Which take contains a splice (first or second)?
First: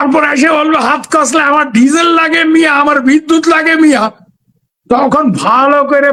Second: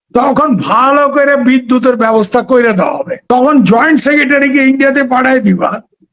second